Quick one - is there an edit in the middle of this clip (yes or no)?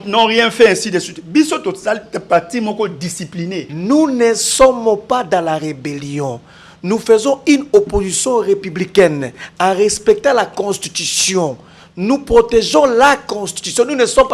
yes